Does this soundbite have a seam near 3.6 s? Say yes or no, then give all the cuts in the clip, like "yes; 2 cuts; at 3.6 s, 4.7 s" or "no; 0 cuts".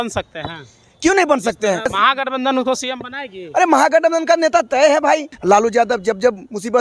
no; 2 cuts; at 1.9 s, 5.3 s